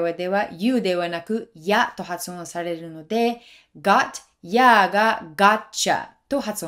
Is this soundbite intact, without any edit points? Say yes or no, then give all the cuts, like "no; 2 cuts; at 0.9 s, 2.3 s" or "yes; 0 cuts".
yes; 0 cuts